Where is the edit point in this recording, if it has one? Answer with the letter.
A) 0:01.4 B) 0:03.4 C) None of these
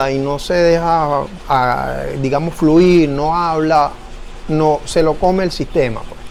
C